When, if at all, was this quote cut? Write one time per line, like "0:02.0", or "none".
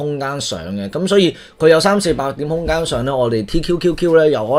none